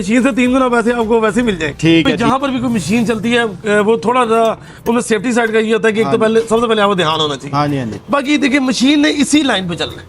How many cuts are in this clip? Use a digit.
1